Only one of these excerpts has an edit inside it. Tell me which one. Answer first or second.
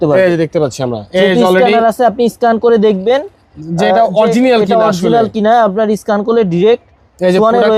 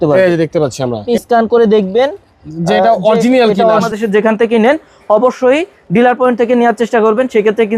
second